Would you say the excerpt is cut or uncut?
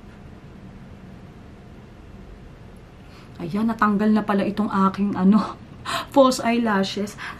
uncut